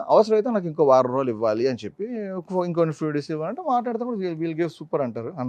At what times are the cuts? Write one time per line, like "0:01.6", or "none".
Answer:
none